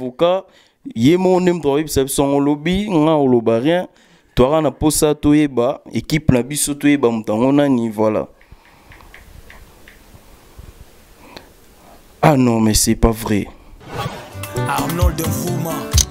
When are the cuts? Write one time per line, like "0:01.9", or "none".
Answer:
0:13.8